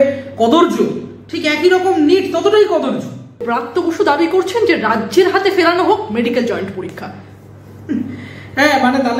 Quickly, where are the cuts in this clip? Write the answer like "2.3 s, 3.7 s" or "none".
3.5 s